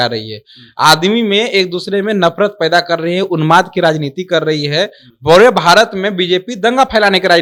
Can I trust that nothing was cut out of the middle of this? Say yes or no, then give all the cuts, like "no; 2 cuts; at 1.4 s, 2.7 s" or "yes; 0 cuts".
yes; 0 cuts